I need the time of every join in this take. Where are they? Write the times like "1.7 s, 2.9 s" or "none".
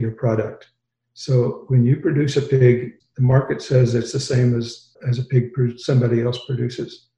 3.0 s, 5.0 s